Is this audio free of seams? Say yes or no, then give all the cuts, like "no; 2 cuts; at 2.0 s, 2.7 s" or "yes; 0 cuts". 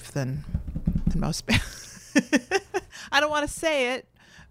yes; 0 cuts